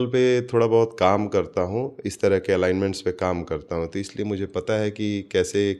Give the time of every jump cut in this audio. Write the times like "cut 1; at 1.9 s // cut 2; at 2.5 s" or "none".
none

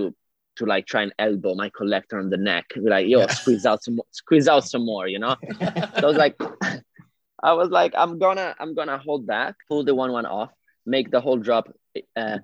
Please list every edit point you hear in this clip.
cut 1; at 9.6 s

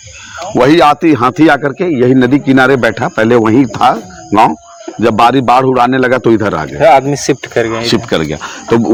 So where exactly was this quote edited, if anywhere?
none

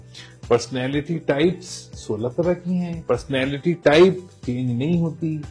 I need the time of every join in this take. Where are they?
cut 1; at 3.0 s

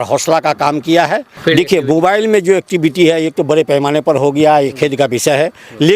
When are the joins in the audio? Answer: cut 1; at 1.3 s

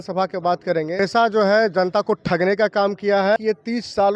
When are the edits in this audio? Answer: cut 1; at 1.0 s // cut 2; at 3.4 s

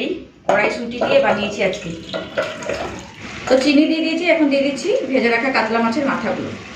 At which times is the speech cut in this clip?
cut 1; at 3.2 s

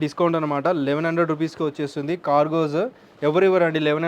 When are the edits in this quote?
none

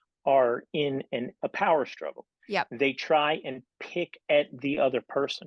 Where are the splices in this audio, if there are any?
cut 1; at 1.4 s

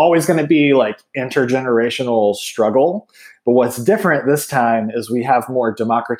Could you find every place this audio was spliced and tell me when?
none

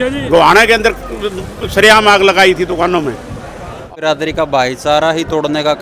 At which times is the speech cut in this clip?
cut 1; at 3.8 s

